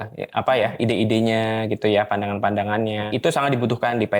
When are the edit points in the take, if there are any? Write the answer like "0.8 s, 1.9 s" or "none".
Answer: 3.1 s